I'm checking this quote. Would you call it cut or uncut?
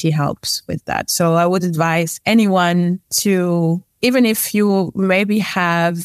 cut